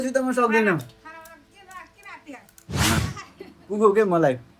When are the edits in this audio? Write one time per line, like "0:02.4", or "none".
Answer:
0:03.0